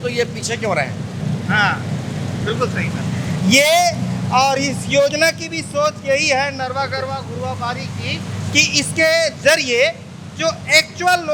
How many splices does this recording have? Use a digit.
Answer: 0